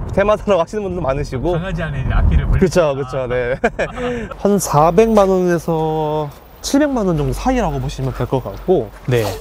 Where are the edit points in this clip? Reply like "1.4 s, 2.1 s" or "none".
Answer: 4.3 s